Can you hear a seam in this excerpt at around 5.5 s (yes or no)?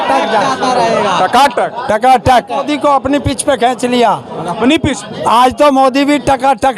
no